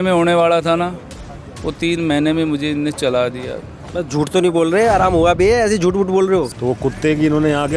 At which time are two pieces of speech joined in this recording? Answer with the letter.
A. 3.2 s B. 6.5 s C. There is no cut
B